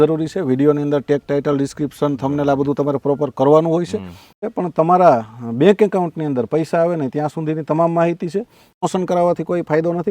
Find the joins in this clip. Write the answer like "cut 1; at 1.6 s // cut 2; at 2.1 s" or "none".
cut 1; at 4.4 s // cut 2; at 8.8 s